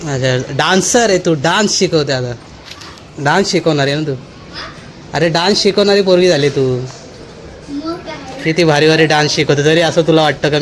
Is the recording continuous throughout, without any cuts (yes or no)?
yes